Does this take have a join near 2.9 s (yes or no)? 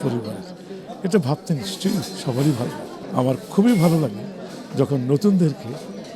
yes